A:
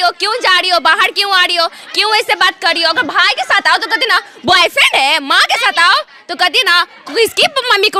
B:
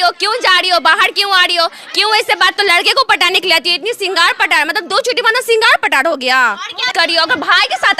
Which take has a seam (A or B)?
B